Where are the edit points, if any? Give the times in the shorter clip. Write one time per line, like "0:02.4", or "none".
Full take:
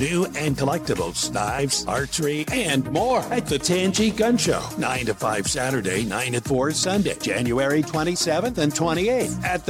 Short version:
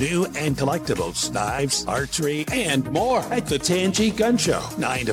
none